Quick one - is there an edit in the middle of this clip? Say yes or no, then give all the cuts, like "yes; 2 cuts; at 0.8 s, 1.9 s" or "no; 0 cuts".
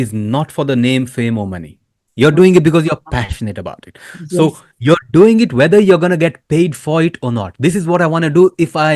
no; 0 cuts